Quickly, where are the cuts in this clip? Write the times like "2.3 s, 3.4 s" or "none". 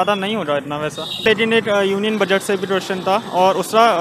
1.2 s